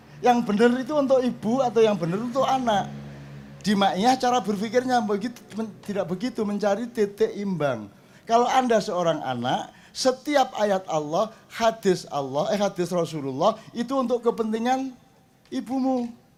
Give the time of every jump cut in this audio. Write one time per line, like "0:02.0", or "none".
none